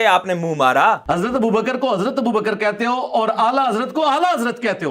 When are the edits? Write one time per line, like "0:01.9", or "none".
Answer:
0:01.0